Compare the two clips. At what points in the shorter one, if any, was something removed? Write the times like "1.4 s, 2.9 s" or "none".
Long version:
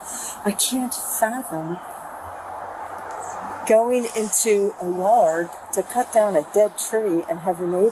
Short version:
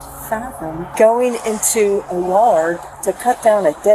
0.9 s